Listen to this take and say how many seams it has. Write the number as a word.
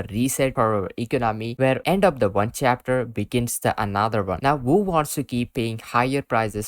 zero